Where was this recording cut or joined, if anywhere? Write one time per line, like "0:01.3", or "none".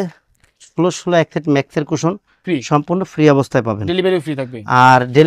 none